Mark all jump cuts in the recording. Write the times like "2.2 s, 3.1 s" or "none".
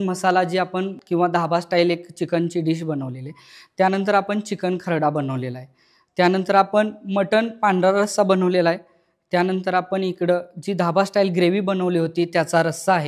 1.0 s